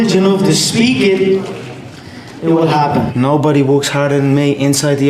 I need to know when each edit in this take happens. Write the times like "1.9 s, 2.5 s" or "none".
3.1 s